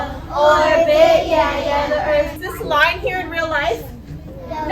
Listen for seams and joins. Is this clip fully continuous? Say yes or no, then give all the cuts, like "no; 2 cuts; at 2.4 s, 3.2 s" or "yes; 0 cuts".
no; 1 cut; at 2.4 s